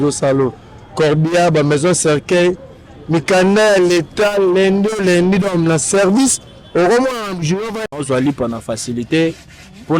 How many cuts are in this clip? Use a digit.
1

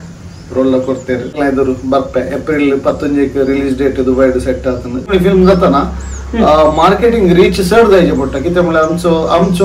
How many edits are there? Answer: 2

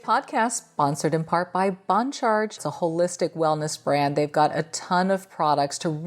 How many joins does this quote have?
1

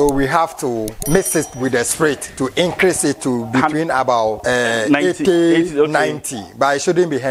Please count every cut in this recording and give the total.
2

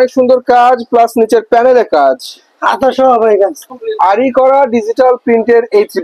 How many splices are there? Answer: 1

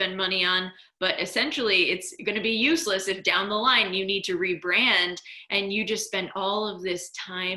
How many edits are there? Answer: 0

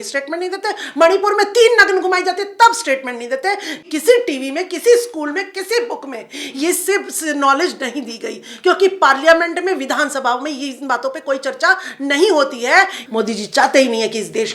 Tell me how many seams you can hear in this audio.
2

